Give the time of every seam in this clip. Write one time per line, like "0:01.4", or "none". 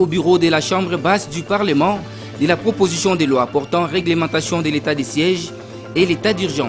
none